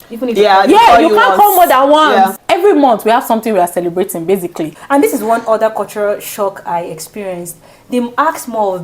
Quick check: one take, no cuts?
no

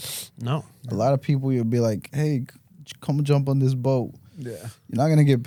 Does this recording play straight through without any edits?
yes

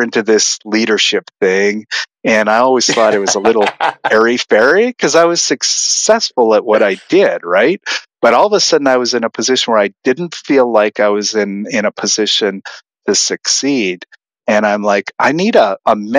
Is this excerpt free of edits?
yes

